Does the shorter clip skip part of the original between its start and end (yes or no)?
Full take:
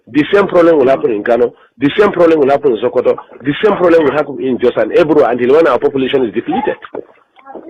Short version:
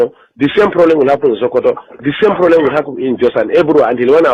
no